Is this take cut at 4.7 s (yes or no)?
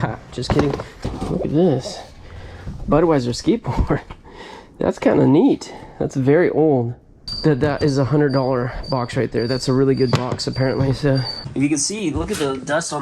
no